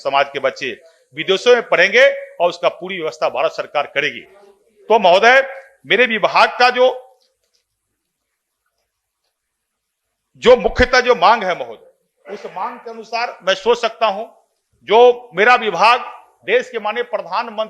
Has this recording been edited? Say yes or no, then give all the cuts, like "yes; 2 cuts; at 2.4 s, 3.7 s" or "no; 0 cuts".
no; 0 cuts